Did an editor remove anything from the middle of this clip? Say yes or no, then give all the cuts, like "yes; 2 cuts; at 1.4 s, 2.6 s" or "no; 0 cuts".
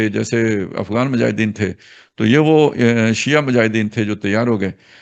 no; 0 cuts